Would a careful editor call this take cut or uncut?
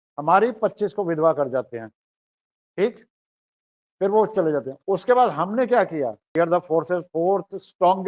cut